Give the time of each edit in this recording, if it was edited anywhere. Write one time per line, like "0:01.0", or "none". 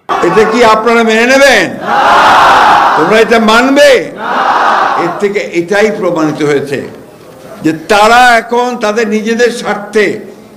none